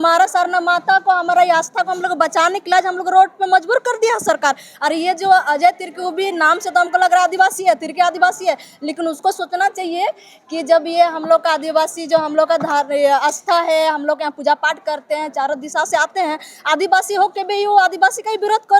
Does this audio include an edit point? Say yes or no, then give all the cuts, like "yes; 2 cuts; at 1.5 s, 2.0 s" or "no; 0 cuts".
no; 0 cuts